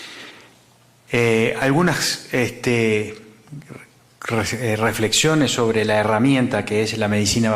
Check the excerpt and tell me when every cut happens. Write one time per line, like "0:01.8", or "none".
0:01.9